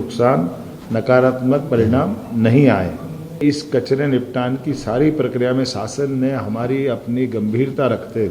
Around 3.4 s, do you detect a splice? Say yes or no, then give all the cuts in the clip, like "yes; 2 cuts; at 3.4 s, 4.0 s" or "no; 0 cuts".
yes; 1 cut; at 3.4 s